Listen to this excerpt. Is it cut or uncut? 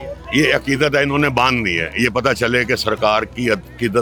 uncut